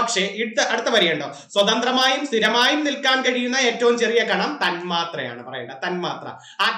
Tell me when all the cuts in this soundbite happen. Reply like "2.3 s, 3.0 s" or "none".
none